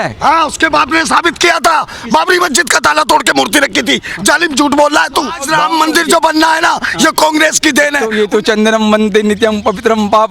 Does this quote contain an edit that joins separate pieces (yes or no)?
yes